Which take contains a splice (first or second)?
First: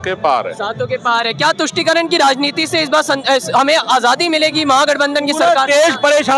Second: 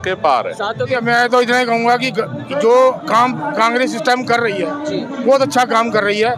second